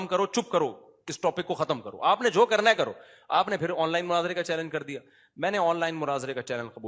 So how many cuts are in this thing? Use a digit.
0